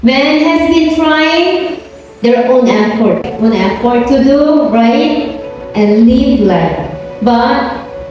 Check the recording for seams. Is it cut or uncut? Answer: cut